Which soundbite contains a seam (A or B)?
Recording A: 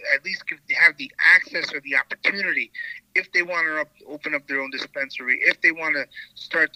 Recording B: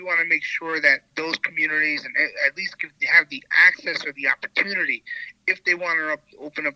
B